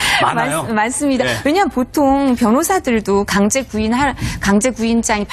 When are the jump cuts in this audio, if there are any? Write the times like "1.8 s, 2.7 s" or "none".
none